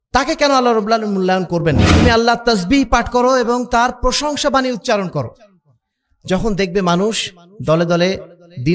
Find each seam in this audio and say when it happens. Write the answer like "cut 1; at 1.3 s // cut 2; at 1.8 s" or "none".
cut 1; at 1.9 s

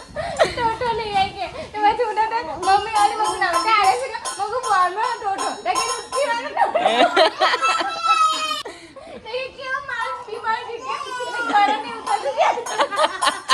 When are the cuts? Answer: cut 1; at 8.6 s

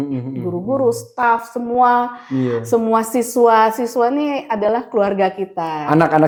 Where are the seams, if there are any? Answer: none

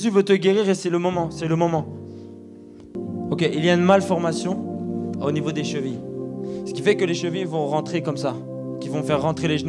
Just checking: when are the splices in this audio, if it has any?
cut 1; at 2.9 s

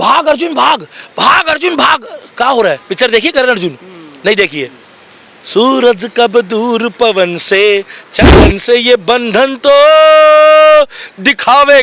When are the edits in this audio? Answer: cut 1; at 8.3 s

